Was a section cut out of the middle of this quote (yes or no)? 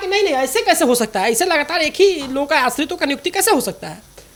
no